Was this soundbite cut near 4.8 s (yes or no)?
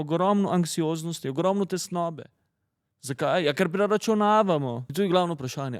yes